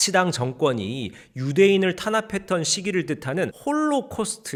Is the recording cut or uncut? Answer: uncut